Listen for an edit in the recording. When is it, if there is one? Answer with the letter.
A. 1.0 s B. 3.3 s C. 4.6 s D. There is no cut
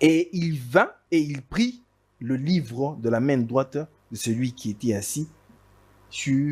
A